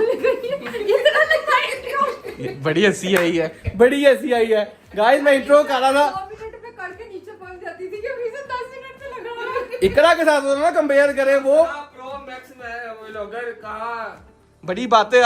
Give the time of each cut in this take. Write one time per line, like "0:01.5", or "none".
none

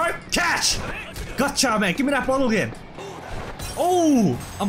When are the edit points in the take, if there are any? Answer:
0:03.2

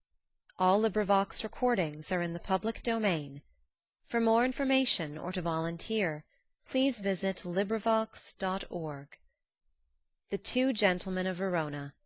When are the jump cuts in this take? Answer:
none

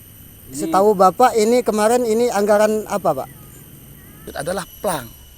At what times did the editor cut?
0:04.2

